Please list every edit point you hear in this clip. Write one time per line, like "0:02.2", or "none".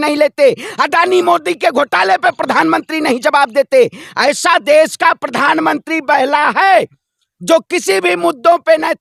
none